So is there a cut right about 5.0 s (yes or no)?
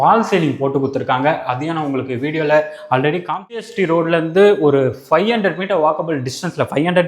no